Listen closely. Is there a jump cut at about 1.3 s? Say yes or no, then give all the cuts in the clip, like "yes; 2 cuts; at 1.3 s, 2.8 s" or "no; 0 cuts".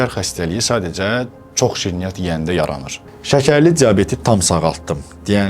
no; 1 cut; at 2.9 s